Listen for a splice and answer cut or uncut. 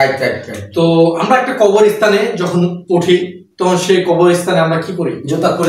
uncut